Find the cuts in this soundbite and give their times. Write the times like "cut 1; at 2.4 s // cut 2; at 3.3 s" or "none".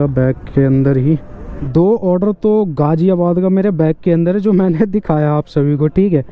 cut 1; at 1.6 s